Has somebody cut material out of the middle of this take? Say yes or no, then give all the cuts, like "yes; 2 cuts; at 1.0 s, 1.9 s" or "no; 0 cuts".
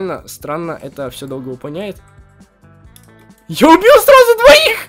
no; 0 cuts